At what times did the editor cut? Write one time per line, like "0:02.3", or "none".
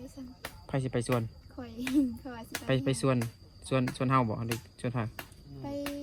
none